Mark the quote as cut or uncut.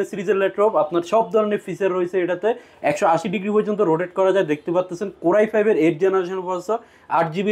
uncut